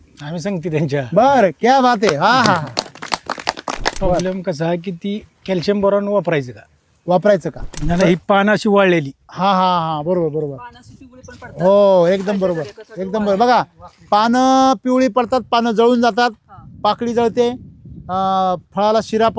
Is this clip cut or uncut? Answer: cut